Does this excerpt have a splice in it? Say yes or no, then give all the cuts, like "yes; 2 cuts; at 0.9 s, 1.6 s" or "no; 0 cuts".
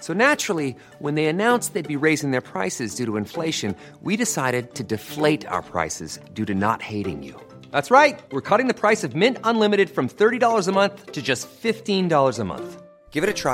no; 0 cuts